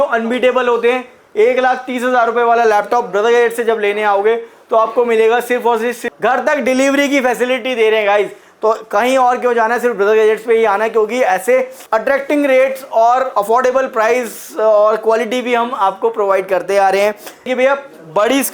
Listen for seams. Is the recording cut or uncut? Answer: cut